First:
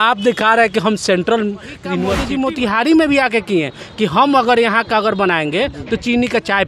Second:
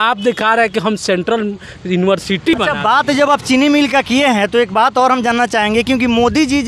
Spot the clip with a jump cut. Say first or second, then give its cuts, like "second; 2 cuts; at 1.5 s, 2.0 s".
first; 1 cut; at 2.2 s